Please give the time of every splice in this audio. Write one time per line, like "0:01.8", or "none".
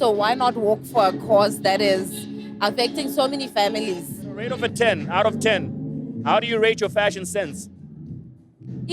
0:04.5